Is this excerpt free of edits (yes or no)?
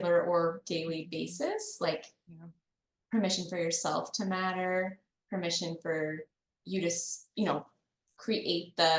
yes